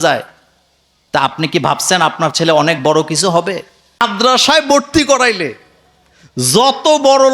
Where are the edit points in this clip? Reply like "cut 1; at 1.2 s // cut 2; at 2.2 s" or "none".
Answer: cut 1; at 4.0 s